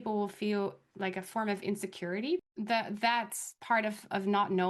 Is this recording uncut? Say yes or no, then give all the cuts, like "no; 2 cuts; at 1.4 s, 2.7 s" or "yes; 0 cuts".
no; 2 cuts; at 0.8 s, 2.4 s